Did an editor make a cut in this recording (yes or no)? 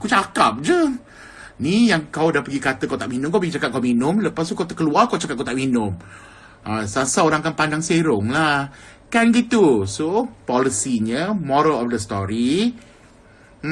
yes